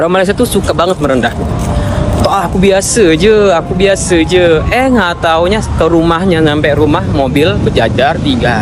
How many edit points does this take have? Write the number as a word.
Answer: zero